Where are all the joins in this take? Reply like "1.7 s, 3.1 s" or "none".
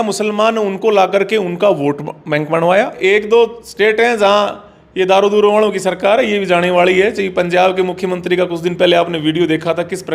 3.0 s